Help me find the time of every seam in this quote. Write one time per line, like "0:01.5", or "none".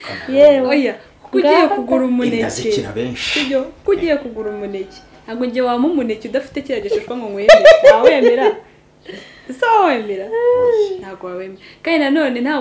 none